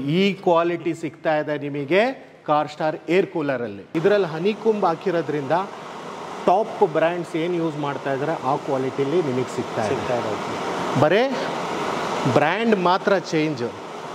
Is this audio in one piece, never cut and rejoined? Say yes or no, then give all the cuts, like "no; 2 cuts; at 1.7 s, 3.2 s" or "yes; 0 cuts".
no; 1 cut; at 3.8 s